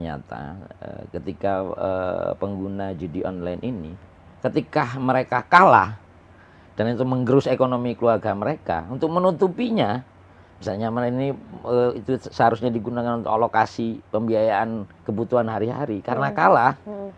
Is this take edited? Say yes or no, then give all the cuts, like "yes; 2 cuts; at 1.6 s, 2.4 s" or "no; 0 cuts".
no; 0 cuts